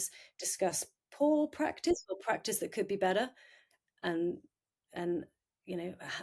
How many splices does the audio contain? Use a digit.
0